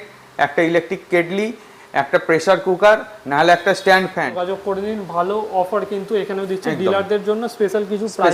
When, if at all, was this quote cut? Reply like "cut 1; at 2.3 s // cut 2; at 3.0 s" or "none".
cut 1; at 4.4 s